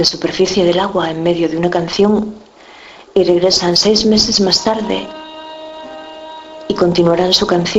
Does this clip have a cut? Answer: yes; 1 cut; at 6.1 s

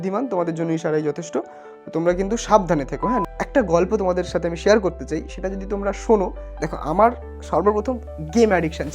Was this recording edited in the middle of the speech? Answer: yes; 2 cuts; at 3.2 s, 6.4 s

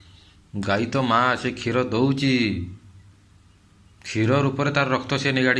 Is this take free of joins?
yes; 0 cuts

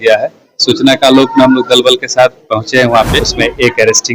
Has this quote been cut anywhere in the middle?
yes; 1 cut; at 3.2 s

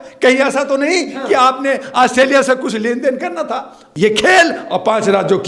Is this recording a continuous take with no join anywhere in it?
no; 1 cut; at 3.8 s

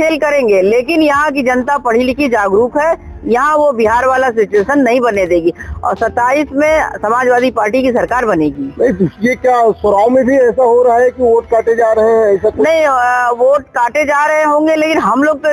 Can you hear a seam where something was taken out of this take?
no; 0 cuts

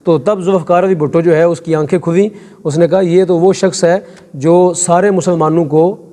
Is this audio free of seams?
yes; 0 cuts

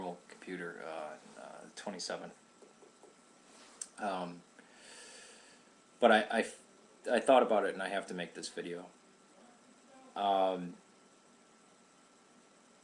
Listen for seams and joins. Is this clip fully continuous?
yes; 0 cuts

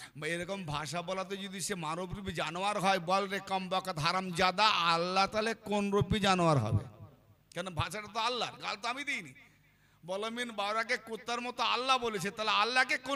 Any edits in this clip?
no; 0 cuts

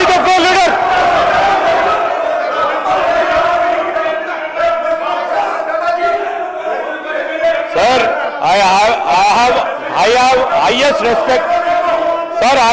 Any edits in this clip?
no; 0 cuts

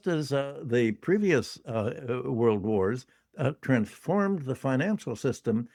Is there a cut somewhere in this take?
no; 0 cuts

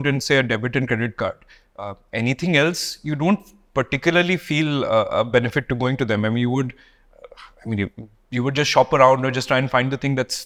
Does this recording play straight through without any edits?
yes; 0 cuts

